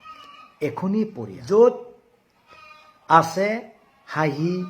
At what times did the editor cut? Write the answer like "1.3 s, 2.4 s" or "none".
1.3 s